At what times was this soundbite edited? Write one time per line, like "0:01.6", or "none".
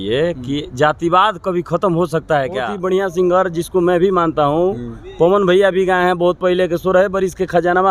0:02.7